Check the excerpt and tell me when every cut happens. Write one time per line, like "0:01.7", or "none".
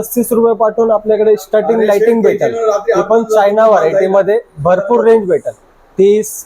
none